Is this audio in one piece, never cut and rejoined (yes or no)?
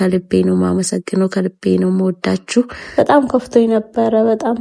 no